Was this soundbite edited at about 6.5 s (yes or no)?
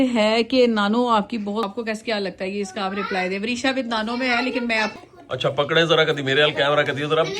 no